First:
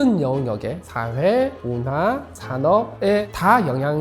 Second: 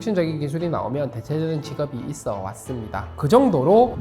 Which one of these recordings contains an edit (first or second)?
second